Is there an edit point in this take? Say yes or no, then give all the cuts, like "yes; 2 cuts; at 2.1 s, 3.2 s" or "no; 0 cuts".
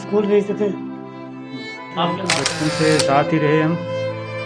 yes; 1 cut; at 2.4 s